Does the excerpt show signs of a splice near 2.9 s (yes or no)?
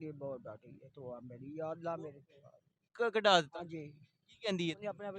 yes